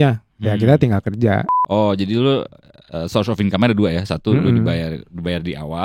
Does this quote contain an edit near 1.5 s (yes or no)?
yes